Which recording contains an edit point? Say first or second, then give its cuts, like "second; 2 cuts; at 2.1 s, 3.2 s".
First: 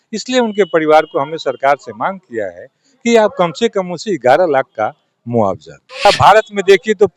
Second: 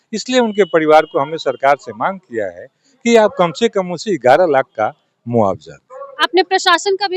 first; 1 cut; at 6.0 s